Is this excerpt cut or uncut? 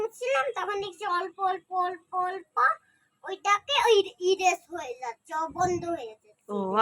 uncut